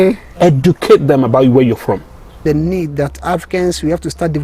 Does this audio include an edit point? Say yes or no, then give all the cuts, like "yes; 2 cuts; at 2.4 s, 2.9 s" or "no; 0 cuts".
yes; 1 cut; at 2.4 s